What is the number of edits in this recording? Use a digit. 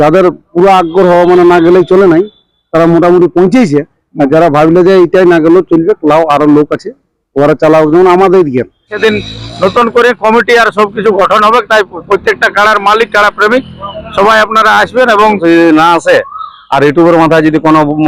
2